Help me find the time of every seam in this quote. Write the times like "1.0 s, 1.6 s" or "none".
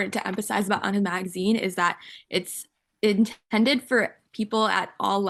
none